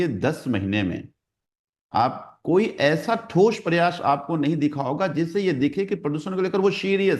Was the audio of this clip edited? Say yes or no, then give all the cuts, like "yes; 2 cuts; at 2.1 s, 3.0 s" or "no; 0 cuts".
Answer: no; 0 cuts